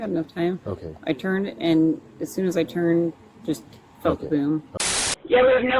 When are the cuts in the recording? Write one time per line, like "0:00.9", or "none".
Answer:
0:04.7